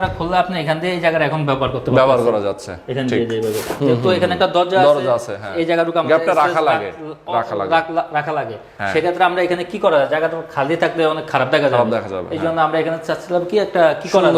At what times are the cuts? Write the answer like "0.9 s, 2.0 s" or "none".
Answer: 3.7 s